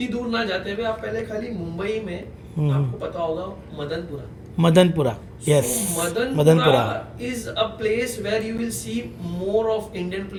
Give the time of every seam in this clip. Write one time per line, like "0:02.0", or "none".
none